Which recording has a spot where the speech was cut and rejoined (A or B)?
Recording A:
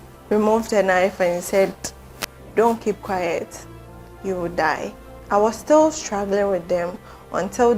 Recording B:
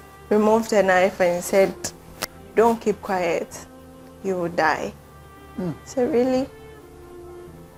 A